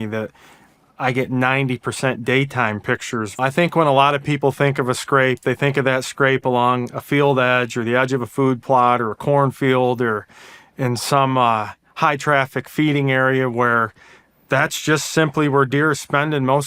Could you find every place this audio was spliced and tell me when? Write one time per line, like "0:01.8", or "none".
0:03.4